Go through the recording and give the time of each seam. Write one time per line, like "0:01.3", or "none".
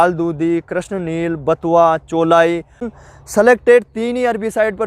0:02.9